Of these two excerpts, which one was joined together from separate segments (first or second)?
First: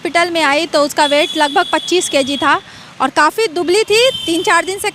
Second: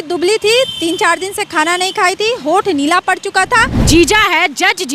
second